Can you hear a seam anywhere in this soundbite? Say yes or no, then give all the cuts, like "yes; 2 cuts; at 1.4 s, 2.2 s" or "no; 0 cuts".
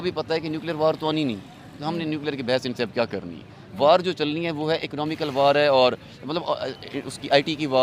no; 0 cuts